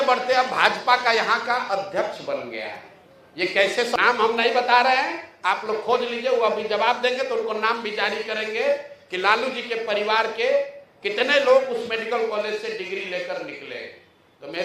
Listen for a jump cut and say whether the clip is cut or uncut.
cut